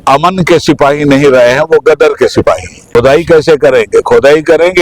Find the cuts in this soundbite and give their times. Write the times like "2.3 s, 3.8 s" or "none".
2.7 s

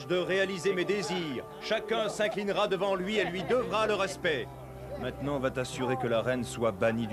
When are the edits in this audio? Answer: 1.9 s

